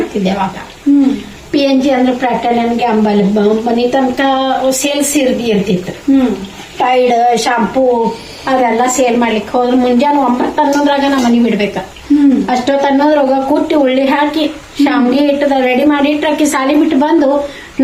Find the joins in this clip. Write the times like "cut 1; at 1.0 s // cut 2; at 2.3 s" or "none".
none